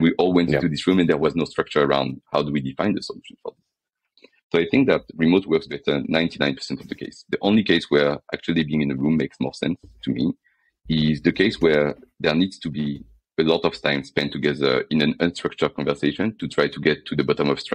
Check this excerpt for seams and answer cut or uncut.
uncut